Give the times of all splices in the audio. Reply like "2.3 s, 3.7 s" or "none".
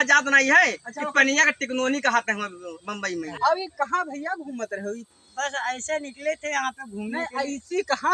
3.3 s